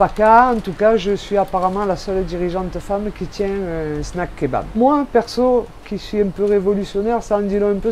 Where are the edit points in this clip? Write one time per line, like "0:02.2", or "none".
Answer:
none